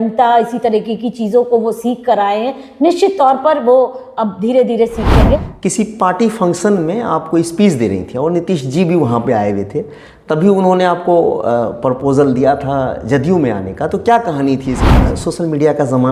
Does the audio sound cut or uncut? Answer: cut